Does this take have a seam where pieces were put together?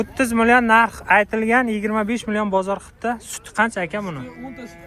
no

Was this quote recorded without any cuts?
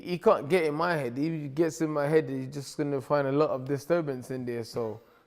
yes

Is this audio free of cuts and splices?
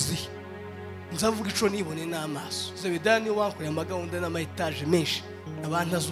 yes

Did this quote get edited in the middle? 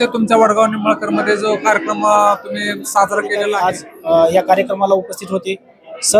yes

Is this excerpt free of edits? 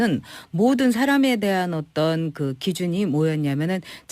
no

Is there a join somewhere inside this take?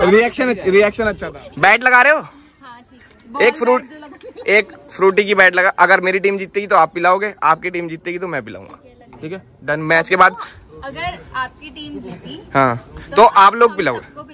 yes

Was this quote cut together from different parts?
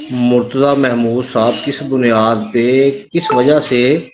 no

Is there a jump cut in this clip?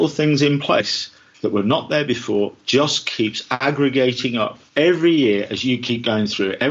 yes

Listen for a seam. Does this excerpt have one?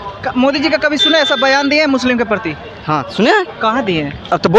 no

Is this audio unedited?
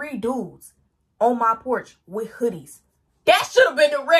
yes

